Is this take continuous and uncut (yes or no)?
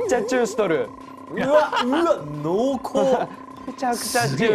yes